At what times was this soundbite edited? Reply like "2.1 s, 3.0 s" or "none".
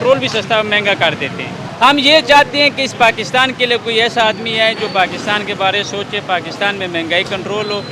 none